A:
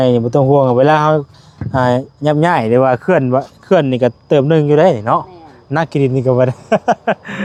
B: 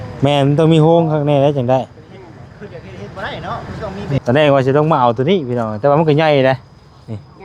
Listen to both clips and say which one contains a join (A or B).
B